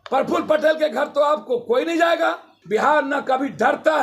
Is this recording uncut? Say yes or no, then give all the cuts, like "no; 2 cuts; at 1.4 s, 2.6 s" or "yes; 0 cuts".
no; 1 cut; at 2.5 s